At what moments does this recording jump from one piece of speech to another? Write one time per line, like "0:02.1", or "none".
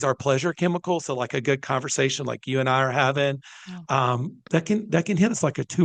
none